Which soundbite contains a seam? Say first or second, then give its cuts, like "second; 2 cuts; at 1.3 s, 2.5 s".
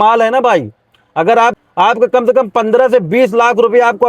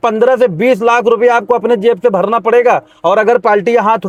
first; 1 cut; at 1.6 s